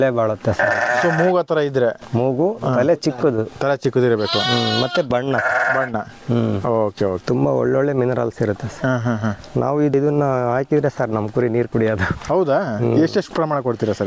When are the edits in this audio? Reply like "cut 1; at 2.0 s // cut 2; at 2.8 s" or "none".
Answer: cut 1; at 7.2 s // cut 2; at 9.9 s